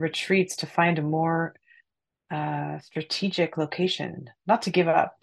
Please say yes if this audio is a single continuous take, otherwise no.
yes